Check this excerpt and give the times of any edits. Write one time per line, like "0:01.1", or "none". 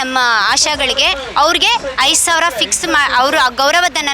none